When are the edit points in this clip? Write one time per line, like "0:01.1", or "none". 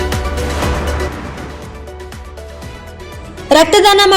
none

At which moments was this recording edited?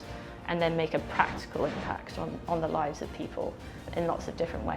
0:03.9

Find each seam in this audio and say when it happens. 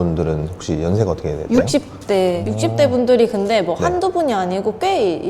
0:02.4

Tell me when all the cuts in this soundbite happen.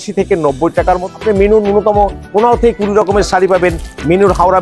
0:01.2

